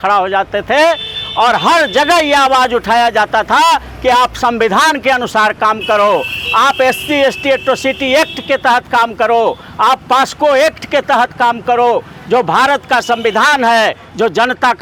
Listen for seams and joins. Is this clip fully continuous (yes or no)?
yes